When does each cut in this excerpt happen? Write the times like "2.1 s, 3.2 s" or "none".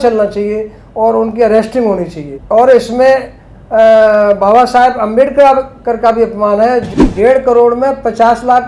6.9 s

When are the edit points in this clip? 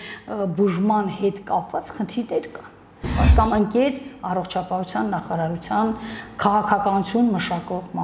3.2 s

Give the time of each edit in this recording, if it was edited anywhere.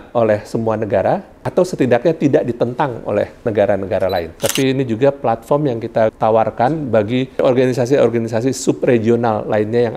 1.4 s, 3.4 s, 4.3 s, 6.1 s, 7.4 s

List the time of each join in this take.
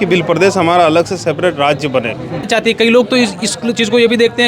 2.5 s

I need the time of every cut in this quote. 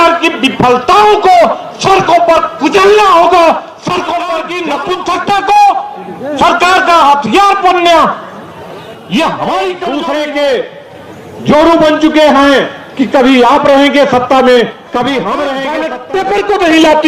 4.6 s, 9.9 s, 15.9 s

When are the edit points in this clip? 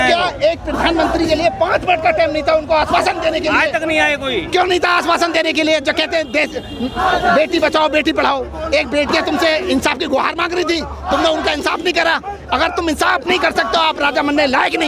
none

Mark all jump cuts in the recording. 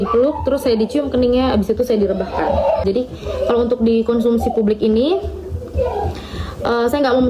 2.8 s

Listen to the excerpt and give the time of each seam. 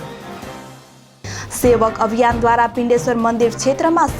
1.0 s

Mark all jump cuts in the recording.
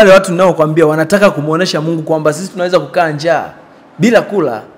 none

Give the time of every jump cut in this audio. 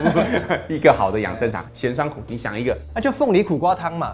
1.6 s, 2.8 s

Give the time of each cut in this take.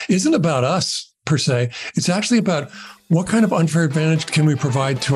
4.3 s

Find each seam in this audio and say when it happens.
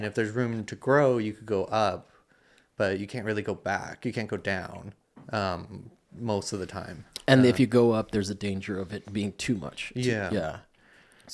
none

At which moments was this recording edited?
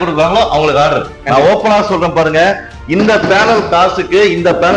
none

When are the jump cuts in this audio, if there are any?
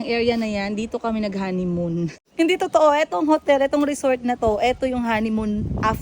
2.1 s

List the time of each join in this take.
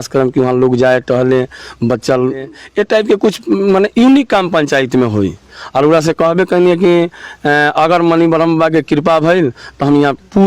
2.6 s

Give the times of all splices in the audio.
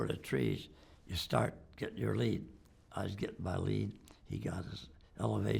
none

